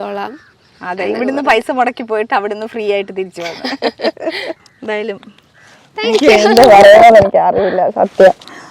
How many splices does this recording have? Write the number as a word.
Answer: one